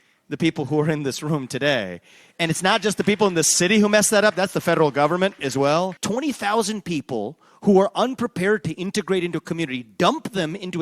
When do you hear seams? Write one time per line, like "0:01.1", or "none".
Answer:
0:06.0